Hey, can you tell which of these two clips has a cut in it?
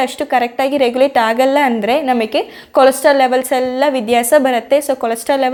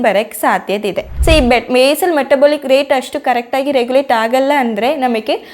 second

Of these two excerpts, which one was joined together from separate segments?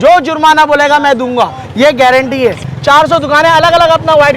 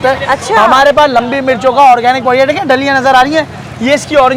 first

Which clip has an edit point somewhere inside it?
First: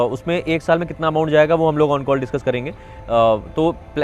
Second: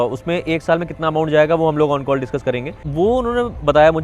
second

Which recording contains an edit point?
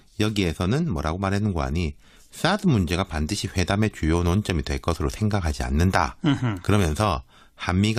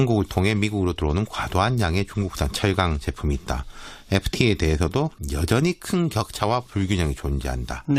second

